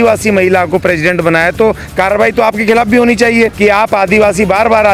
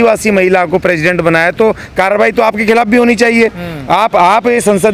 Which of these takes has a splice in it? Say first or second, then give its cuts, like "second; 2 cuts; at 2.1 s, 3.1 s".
first; 1 cut; at 3.5 s